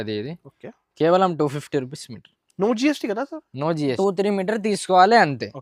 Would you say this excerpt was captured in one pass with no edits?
no; 1 cut; at 4.0 s

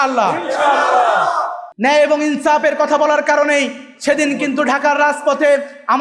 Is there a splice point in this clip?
yes; 1 cut; at 1.6 s

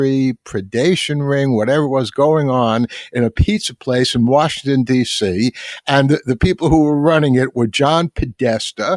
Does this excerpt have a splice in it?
no; 0 cuts

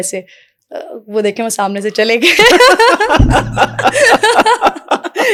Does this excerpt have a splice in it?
no; 0 cuts

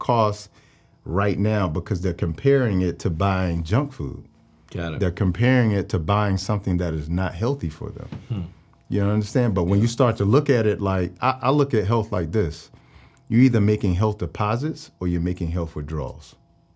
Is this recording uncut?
yes; 0 cuts

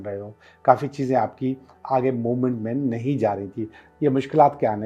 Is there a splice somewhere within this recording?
yes; 1 cut; at 3.8 s

